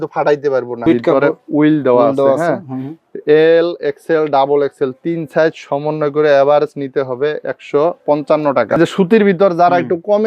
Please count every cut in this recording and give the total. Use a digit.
2